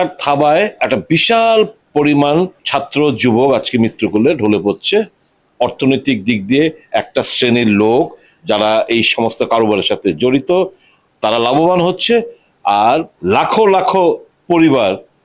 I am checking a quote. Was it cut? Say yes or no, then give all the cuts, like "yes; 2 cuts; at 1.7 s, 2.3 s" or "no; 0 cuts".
yes; 4 cuts; at 0.8 s, 1.8 s, 2.6 s, 13.1 s